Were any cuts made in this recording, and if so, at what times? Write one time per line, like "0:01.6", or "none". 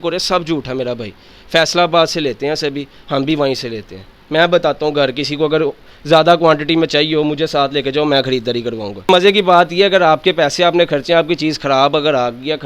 0:09.1